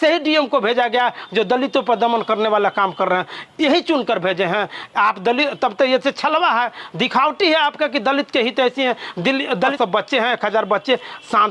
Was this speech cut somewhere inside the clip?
yes; 1 cut; at 9.7 s

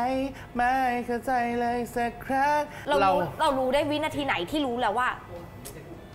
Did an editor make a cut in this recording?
yes; 1 cut; at 2.8 s

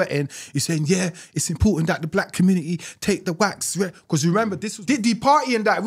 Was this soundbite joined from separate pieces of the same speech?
yes; 1 cut; at 4.7 s

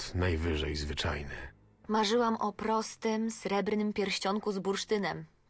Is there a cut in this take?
yes; 1 cut; at 1.4 s

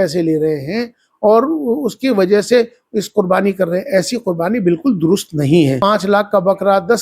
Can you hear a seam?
yes; 1 cut; at 5.8 s

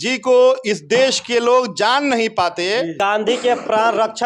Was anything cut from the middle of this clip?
yes; 1 cut; at 2.9 s

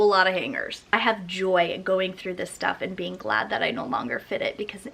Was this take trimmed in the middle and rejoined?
yes; 1 cut; at 0.9 s

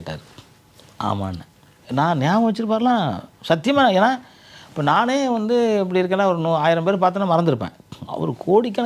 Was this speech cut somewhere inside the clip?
yes; 1 cut; at 1.8 s

